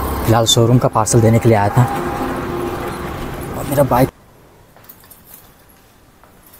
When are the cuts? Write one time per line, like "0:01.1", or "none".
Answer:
0:04.1